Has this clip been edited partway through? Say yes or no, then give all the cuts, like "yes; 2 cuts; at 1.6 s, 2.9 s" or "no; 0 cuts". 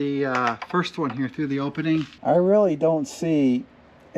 yes; 1 cut; at 2.1 s